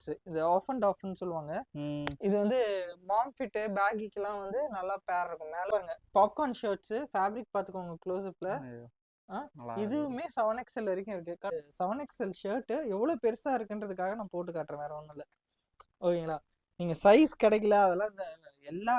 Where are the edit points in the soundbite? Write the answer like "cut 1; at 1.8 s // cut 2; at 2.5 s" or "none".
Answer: cut 1; at 5.6 s // cut 2; at 11.5 s

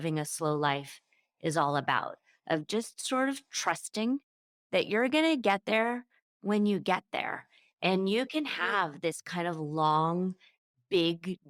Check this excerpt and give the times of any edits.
none

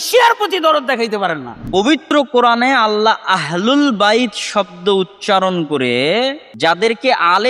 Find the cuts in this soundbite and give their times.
cut 1; at 1.9 s // cut 2; at 6.4 s

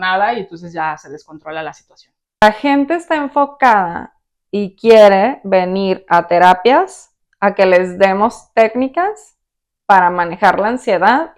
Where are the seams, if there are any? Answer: cut 1; at 2.4 s

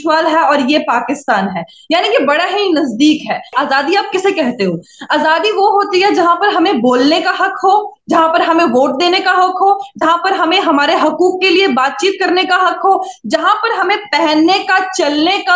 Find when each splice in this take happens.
cut 1; at 3.5 s

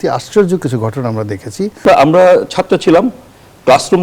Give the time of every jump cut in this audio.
cut 1; at 1.8 s

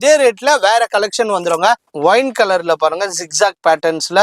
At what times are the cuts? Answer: cut 1; at 1.9 s

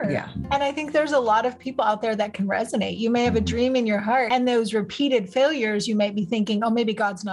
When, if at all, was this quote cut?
cut 1; at 4.3 s

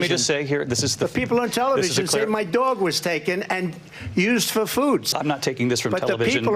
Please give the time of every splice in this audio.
cut 1; at 5.1 s

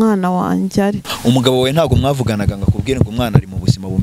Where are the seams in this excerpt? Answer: cut 1; at 1.1 s

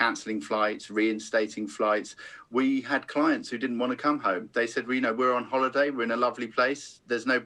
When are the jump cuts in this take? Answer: none

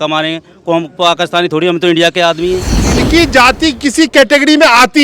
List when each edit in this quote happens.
cut 1; at 2.9 s

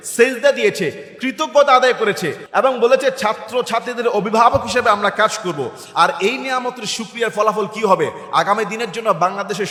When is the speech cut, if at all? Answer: none

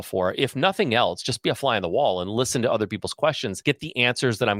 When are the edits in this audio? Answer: cut 1; at 3.5 s

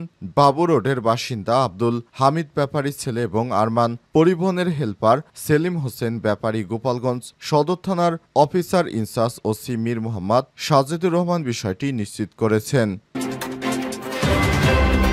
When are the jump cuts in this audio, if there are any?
cut 1; at 13.1 s

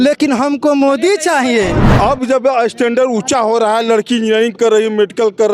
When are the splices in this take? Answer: cut 1; at 1.8 s

